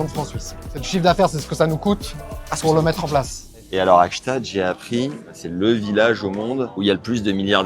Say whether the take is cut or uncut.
cut